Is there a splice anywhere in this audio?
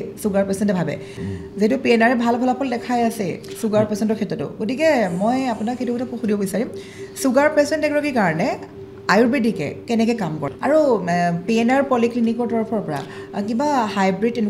yes; 2 cuts; at 1.2 s, 10.5 s

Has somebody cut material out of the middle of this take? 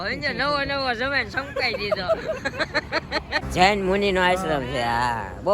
yes; 1 cut; at 3.4 s

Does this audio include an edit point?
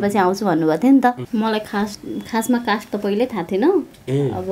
yes; 1 cut; at 1.2 s

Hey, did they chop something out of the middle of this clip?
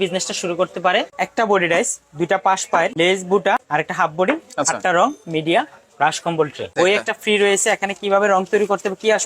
yes; 4 cuts; at 1.2 s, 2.9 s, 3.6 s, 6.7 s

